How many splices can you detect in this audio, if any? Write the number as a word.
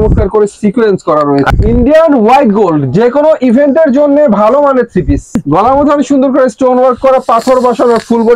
two